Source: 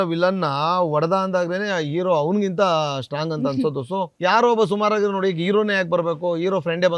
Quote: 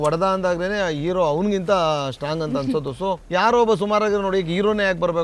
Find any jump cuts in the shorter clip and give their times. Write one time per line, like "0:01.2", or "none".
none